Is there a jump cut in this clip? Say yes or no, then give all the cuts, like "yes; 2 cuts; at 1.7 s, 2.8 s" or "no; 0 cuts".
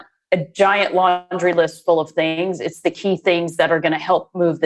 no; 0 cuts